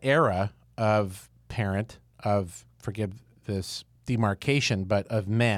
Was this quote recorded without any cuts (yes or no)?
yes